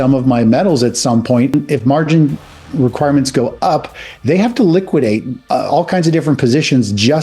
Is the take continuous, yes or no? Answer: no